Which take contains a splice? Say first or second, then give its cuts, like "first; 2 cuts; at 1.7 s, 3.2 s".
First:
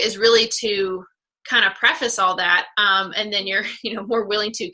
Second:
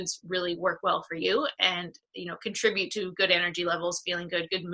first; 1 cut; at 2.7 s